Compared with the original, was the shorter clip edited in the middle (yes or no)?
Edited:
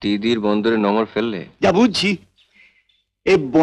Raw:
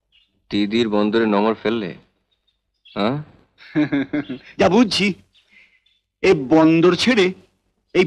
yes